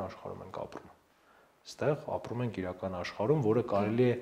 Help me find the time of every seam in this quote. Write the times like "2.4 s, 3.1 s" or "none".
none